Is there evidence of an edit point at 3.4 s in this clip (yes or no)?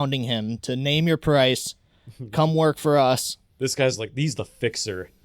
yes